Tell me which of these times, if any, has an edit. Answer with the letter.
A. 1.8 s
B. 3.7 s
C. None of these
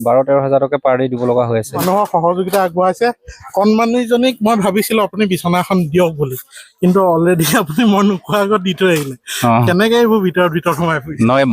A